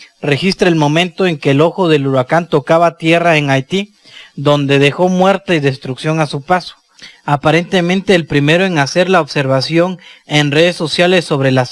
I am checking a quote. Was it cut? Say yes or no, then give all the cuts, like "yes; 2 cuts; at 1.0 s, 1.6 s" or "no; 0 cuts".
yes; 1 cut; at 4.7 s